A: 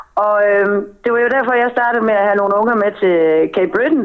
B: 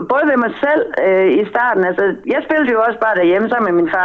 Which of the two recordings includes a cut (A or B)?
B